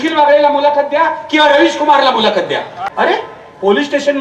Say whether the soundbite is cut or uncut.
cut